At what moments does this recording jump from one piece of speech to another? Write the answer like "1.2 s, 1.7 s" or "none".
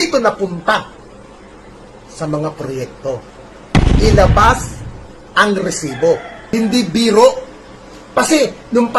6.5 s